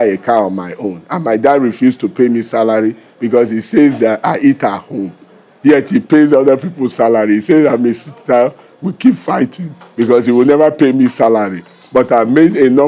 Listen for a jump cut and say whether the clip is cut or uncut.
uncut